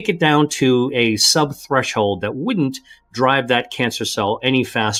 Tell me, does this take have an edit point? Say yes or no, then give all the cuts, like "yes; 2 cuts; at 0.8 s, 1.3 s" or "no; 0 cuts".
no; 0 cuts